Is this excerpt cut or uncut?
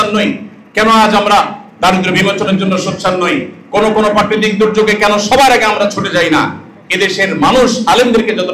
uncut